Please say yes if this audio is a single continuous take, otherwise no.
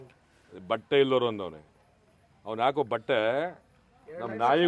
yes